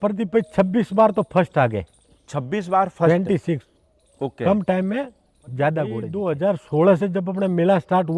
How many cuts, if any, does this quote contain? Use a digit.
1